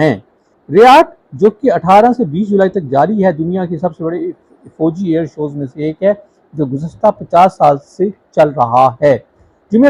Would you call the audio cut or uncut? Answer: uncut